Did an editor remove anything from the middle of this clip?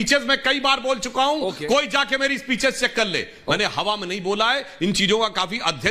no; 0 cuts

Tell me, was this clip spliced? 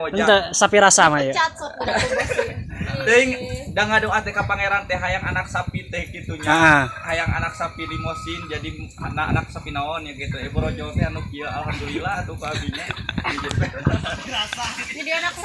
no; 0 cuts

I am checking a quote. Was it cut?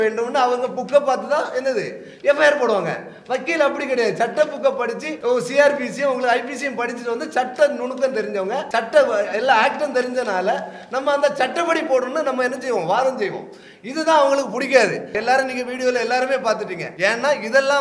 yes; 4 cuts; at 5.1 s, 8.6 s, 15.2 s, 16.8 s

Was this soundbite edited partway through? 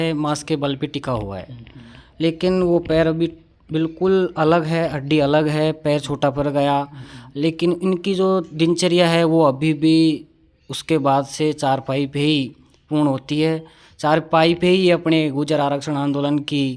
no; 0 cuts

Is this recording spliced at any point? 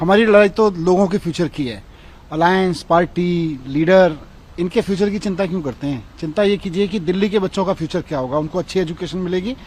no; 0 cuts

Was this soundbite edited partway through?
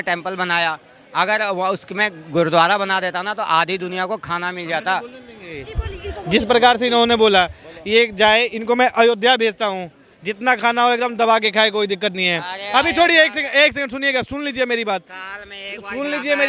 no; 0 cuts

